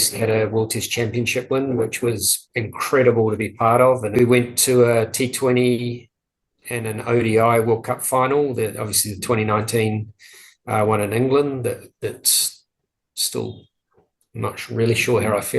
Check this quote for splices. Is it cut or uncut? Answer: cut